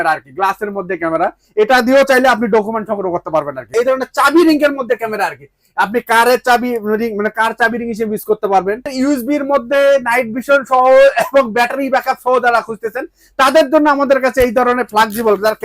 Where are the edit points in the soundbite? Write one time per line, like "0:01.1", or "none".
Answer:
0:03.7
0:08.9